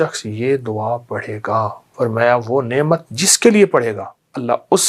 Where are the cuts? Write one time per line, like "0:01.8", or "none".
0:01.8